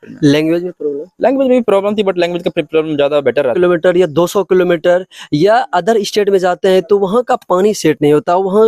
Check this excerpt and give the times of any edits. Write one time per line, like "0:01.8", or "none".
0:03.5